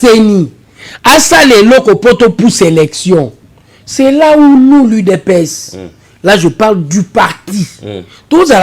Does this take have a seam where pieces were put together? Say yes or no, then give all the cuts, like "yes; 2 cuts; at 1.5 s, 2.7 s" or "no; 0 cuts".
no; 0 cuts